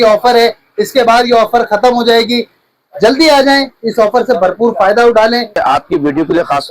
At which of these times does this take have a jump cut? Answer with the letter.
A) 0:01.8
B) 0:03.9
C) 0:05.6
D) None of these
C